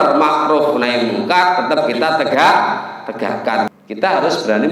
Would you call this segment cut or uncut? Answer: cut